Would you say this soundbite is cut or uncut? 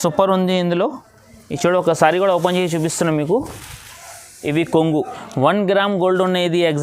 cut